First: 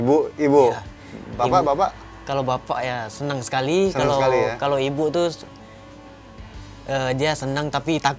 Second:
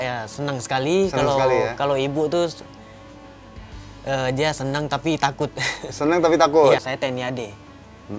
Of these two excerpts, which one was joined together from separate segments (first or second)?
second